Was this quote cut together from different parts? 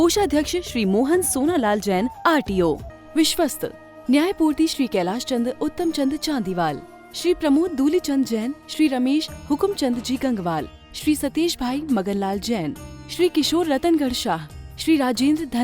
yes; 1 cut; at 2.9 s

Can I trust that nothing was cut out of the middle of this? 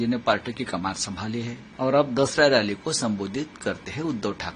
no; 1 cut; at 1.6 s

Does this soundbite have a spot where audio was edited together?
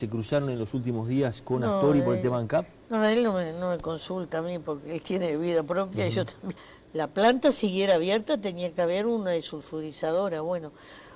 no; 0 cuts

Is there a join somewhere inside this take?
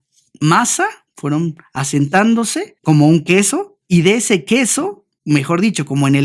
yes; 3 cuts; at 1.1 s, 2.7 s, 3.7 s

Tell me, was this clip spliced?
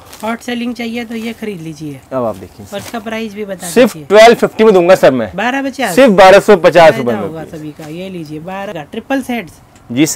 yes; 1 cut; at 8.7 s

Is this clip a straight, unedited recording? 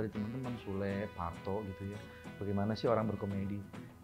yes; 0 cuts

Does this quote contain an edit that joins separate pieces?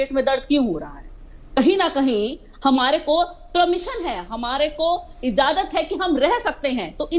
no; 0 cuts

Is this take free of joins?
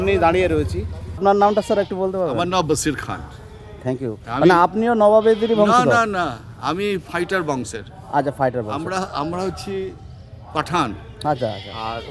no; 1 cut; at 1.2 s

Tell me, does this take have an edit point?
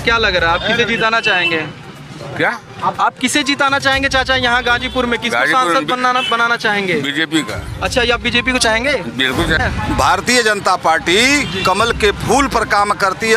yes; 1 cut; at 9.6 s

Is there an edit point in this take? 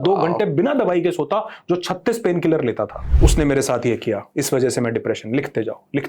yes; 1 cut; at 3.0 s

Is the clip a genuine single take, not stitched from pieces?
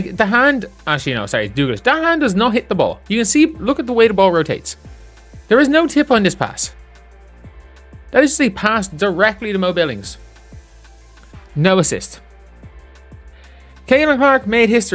no; 2 cuts; at 12.2 s, 13.6 s

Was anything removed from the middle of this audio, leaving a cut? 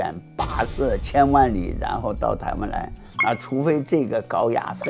yes; 1 cut; at 1.0 s

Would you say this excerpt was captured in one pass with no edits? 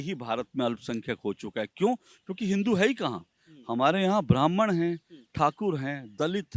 yes; 0 cuts

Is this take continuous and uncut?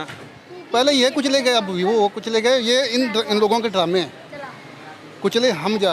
yes; 0 cuts

